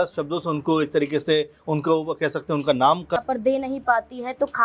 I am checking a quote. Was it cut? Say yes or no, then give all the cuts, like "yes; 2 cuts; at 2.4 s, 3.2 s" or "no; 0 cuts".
yes; 1 cut; at 3.2 s